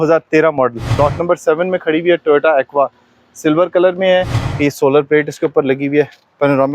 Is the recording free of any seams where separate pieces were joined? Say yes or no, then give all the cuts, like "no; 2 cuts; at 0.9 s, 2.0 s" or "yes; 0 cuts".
no; 2 cuts; at 1.0 s, 4.4 s